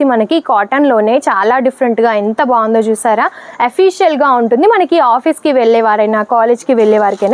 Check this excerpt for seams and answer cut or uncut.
uncut